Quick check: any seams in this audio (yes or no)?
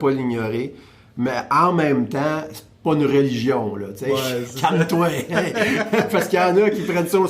no